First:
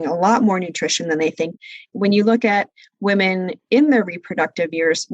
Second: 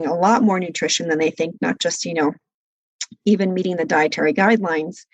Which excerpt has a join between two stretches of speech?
first; 1 cut; at 1.9 s

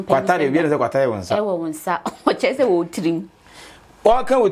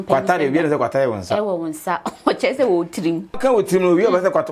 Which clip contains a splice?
second; 1 cut; at 3.4 s

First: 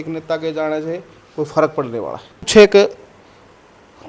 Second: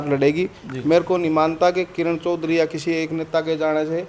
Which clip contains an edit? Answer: first; 1 cut; at 2.5 s

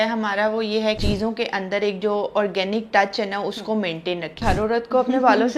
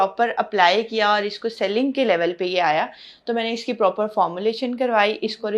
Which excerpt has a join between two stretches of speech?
first; 2 cuts; at 1.0 s, 4.4 s

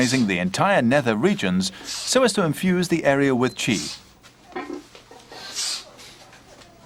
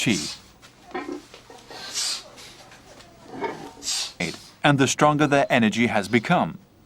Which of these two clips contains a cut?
second; 1 cut; at 4.4 s

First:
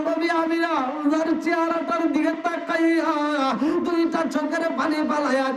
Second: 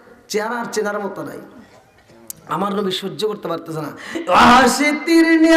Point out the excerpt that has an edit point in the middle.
second; 1 cut; at 4.1 s

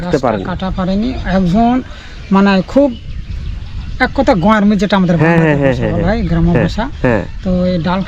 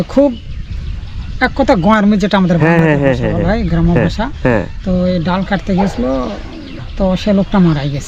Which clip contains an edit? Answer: second; 1 cut; at 6.9 s

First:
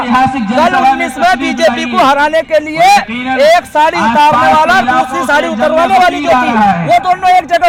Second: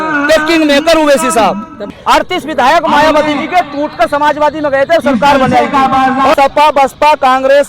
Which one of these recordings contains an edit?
second; 2 cuts; at 1.8 s, 6.3 s

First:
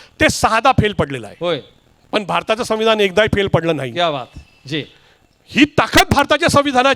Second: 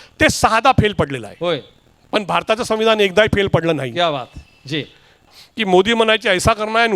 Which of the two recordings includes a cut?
second; 1 cut; at 5.4 s

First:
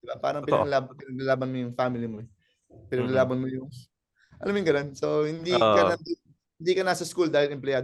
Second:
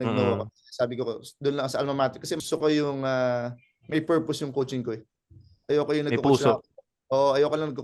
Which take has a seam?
second; 1 cut; at 2.4 s

